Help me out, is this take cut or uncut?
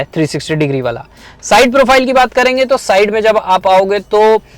uncut